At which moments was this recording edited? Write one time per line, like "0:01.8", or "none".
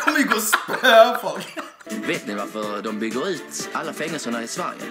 0:01.8